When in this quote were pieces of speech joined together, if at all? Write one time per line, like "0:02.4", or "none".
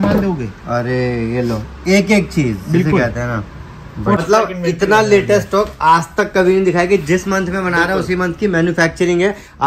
0:04.2